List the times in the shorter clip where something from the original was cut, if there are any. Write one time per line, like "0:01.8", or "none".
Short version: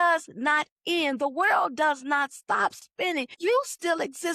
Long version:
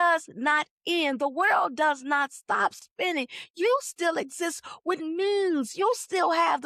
0:03.3